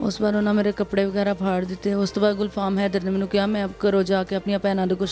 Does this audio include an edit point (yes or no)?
no